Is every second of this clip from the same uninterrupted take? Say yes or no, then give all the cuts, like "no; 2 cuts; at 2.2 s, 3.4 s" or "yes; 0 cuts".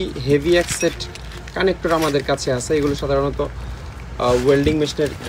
yes; 0 cuts